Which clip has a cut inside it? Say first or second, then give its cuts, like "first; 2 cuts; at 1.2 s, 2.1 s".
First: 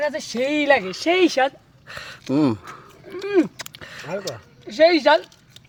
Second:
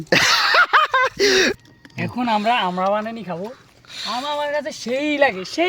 second; 1 cut; at 1.5 s